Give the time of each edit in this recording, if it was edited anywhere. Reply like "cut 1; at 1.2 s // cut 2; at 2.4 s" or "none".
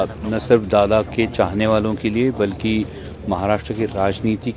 none